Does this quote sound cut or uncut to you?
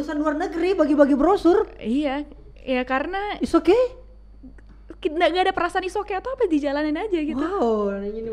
uncut